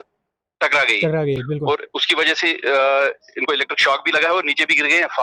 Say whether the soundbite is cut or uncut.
uncut